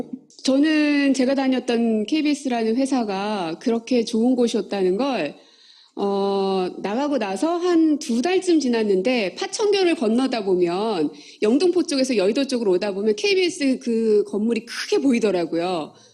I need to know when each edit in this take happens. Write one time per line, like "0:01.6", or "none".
0:03.4